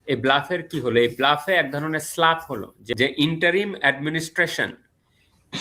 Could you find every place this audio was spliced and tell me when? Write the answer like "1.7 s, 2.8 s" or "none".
2.8 s

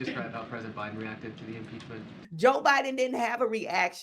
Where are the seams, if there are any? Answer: 2.2 s

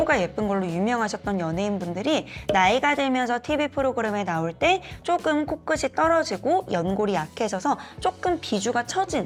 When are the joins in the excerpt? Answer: none

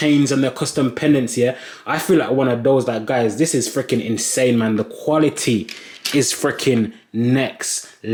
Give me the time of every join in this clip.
none

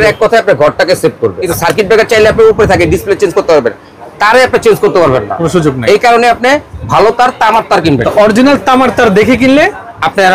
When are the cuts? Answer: 1.4 s, 8.1 s

